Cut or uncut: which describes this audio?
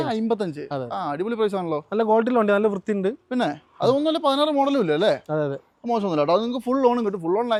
uncut